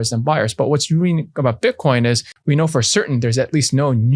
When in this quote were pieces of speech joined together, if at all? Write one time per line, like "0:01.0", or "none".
0:02.3

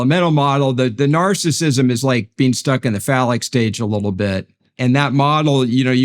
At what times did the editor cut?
0:04.6

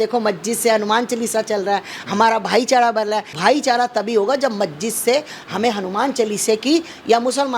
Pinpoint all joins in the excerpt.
0:03.4

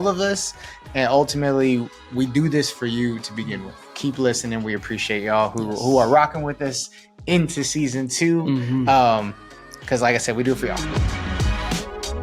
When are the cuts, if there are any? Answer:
0:10.8

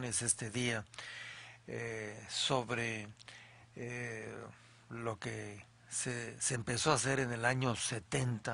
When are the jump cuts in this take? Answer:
0:04.9

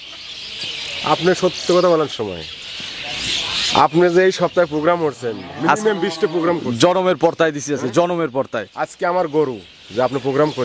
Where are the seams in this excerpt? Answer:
0:02.1

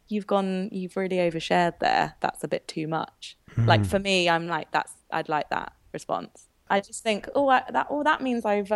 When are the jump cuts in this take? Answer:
0:06.6

